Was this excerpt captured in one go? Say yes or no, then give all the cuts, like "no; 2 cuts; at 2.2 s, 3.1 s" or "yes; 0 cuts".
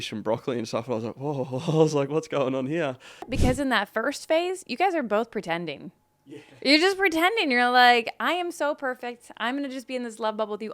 no; 1 cut; at 3.3 s